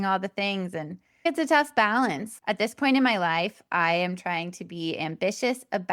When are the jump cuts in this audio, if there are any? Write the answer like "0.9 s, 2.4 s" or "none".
1.3 s

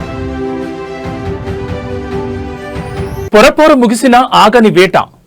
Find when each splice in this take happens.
2.8 s

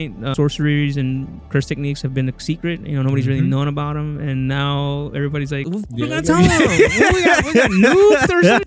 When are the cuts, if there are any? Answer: 5.8 s

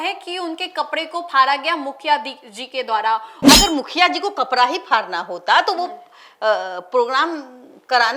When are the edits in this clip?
3.4 s

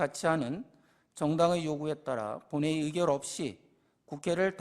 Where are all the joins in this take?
none

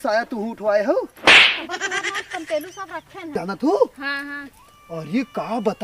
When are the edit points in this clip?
3.3 s

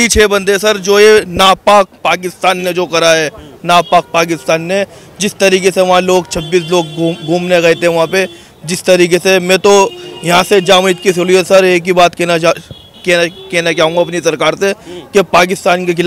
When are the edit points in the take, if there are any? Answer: none

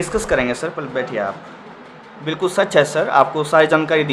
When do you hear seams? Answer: none

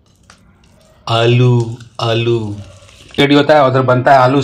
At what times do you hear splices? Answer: 3.2 s

